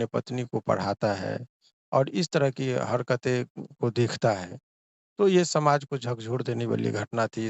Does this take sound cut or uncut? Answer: uncut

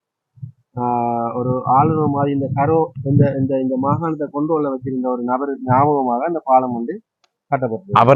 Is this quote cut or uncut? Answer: uncut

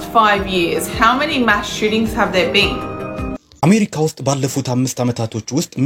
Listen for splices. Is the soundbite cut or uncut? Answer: cut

